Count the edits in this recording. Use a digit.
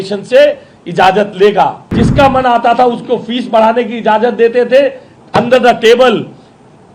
1